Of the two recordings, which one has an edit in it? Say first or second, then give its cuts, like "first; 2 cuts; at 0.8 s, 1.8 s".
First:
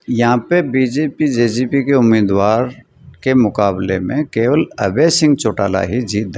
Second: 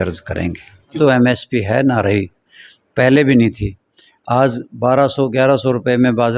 second; 1 cut; at 1.0 s